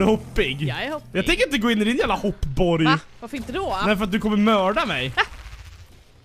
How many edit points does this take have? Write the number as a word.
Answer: zero